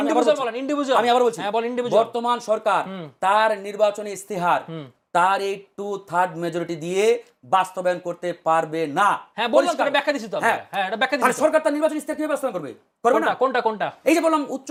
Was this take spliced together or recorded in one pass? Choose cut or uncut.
uncut